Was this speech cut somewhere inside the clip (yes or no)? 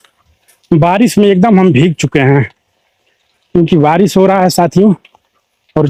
no